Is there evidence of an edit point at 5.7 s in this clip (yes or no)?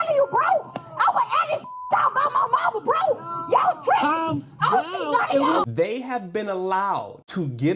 yes